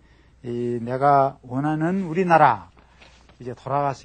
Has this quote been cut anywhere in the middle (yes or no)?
yes